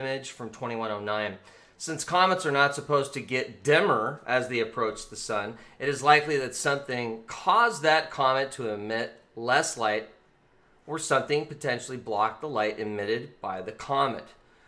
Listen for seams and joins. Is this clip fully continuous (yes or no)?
yes